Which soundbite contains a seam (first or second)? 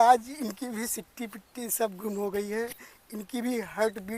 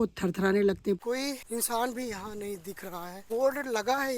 second